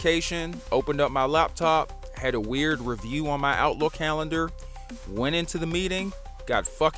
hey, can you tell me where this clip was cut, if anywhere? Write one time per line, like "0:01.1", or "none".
none